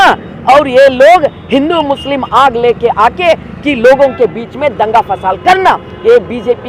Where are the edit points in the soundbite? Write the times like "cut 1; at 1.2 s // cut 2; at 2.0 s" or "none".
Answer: none